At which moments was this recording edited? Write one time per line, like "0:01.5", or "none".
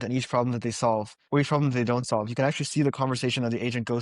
0:01.2